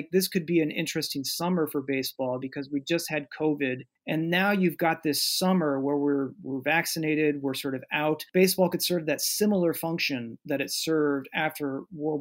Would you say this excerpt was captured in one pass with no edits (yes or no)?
no